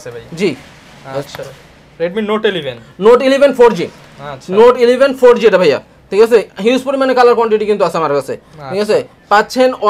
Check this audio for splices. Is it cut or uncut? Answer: uncut